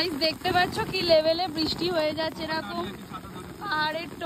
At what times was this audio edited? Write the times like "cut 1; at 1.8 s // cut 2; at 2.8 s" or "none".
none

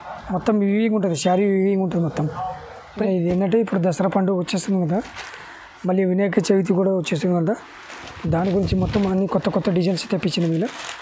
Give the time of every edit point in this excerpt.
cut 1; at 3.1 s

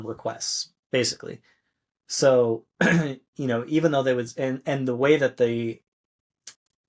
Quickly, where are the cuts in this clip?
none

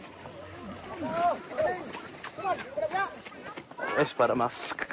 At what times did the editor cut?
none

